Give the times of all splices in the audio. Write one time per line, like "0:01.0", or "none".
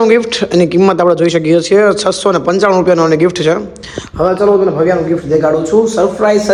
none